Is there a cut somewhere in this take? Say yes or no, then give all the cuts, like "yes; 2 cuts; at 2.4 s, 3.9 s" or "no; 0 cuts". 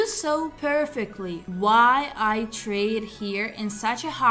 no; 0 cuts